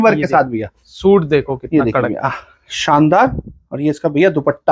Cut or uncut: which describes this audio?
uncut